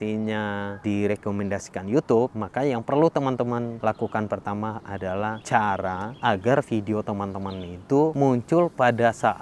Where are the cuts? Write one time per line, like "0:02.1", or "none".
0:00.8
0:02.4
0:03.7
0:05.2
0:06.1
0:08.1